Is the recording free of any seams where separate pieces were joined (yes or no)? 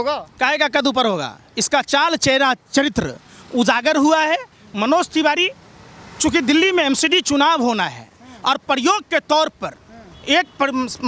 yes